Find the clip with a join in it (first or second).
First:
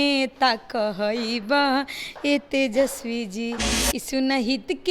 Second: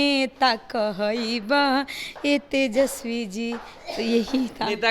first